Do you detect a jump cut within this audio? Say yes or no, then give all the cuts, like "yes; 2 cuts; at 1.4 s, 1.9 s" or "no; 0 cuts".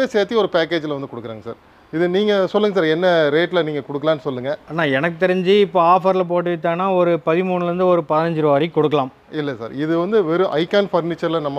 no; 0 cuts